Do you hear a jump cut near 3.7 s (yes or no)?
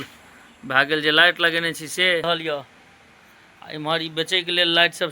no